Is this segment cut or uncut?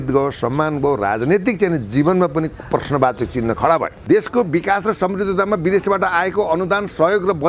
cut